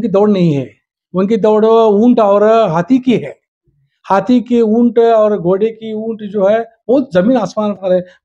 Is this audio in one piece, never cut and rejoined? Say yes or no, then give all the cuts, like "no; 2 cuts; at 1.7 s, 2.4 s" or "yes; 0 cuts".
yes; 0 cuts